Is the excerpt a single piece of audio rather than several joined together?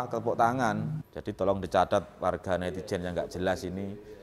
no; 1 cut; at 0.9 s

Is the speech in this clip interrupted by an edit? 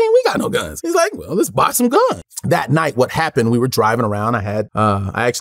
no; 0 cuts

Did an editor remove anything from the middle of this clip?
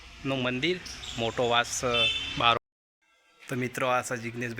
yes; 1 cut; at 2.6 s

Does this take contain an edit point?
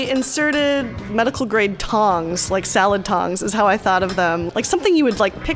yes; 2 cuts; at 1.0 s, 4.4 s

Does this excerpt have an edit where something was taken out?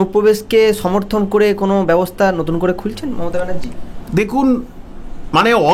no; 0 cuts

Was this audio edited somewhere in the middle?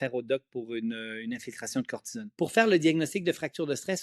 yes; 1 cut; at 2.3 s

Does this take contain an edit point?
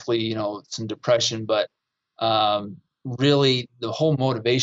no; 0 cuts

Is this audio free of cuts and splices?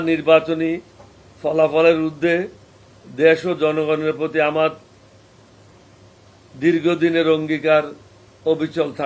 yes; 0 cuts

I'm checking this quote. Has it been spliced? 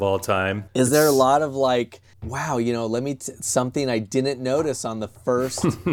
no; 0 cuts

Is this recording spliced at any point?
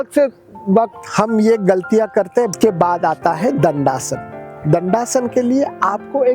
yes; 1 cut; at 2.5 s

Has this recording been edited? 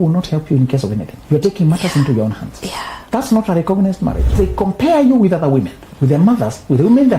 yes; 3 cuts; at 1.1 s, 2.9 s, 4.3 s

